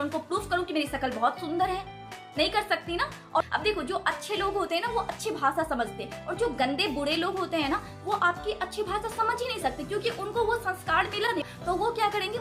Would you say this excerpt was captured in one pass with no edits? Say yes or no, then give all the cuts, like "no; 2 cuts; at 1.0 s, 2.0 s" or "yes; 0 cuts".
yes; 0 cuts